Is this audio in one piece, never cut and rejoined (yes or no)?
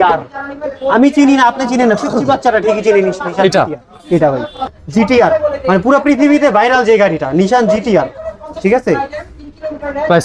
no